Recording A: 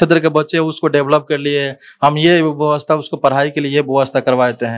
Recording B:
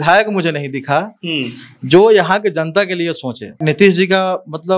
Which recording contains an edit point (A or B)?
B